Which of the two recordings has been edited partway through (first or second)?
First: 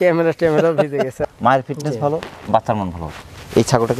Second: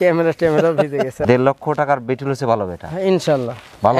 second